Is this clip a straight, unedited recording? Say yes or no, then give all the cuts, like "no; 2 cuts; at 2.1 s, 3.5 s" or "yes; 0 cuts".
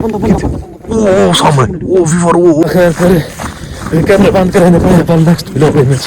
no; 1 cut; at 2.6 s